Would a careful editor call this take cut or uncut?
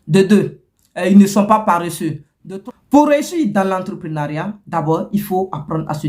cut